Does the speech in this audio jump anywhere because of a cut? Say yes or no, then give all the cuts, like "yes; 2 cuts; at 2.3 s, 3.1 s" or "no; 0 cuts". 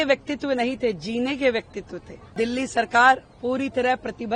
yes; 1 cut; at 2.3 s